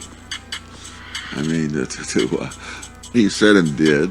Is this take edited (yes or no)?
yes